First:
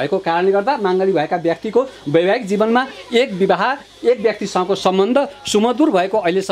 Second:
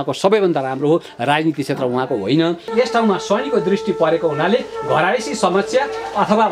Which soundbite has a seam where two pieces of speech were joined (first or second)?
second